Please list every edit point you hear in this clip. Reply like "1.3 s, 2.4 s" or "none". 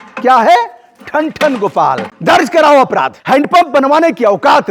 2.1 s, 3.2 s